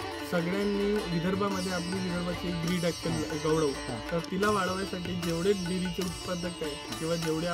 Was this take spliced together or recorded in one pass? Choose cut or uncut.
uncut